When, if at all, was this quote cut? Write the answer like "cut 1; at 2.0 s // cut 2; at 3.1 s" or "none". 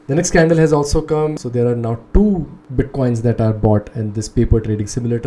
cut 1; at 1.4 s // cut 2; at 2.6 s